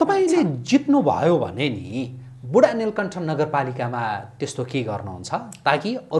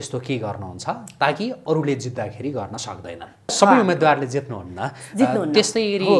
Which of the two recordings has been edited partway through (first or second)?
second